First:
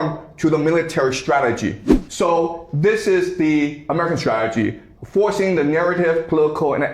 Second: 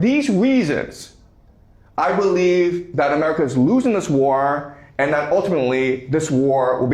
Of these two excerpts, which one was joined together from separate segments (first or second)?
first